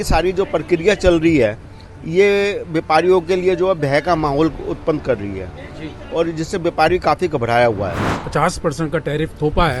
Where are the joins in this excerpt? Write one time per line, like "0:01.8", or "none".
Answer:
0:08.2